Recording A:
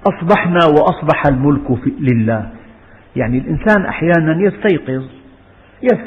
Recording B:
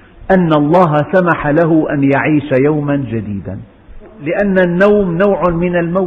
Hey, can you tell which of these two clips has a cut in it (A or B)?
B